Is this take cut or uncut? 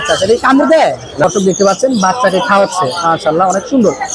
cut